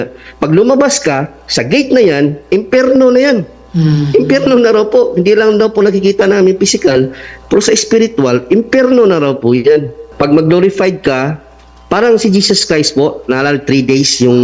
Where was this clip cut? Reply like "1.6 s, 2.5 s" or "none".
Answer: 10.0 s